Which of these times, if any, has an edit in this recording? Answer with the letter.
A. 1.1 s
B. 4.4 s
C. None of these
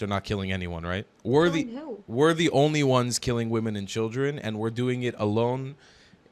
A